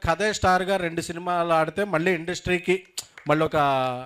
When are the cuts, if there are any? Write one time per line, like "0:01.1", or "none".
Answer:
none